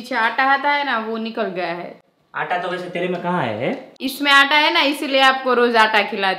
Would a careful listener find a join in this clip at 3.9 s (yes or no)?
yes